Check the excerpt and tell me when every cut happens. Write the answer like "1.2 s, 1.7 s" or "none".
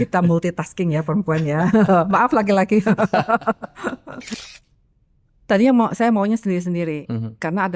4.3 s